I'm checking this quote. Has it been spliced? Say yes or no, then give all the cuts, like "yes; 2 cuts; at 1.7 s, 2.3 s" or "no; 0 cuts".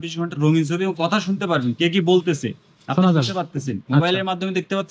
no; 0 cuts